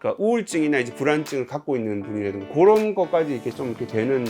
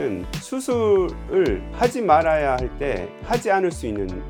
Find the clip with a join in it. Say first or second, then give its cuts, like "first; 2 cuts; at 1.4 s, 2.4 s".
first; 1 cut; at 2.5 s